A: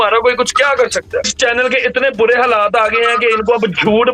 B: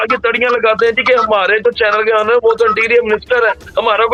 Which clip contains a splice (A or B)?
A